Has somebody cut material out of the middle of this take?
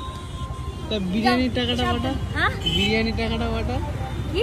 no; 0 cuts

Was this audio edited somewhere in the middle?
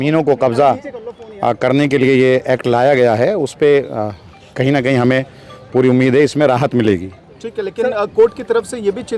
no; 0 cuts

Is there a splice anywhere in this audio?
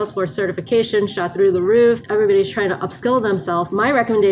yes; 1 cut; at 2.0 s

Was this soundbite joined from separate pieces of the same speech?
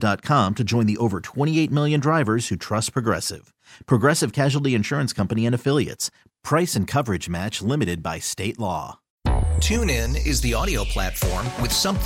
yes; 1 cut; at 9.0 s

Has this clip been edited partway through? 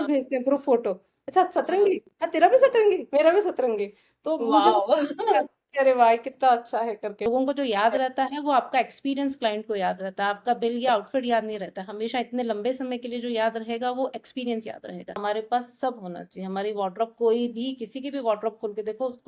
yes; 2 cuts; at 7.2 s, 15.1 s

